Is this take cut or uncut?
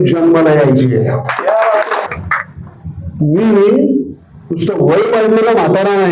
cut